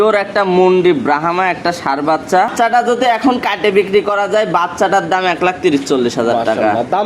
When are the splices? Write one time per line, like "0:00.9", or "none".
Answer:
0:02.5